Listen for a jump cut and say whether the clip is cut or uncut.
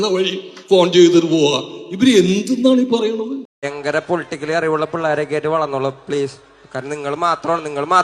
cut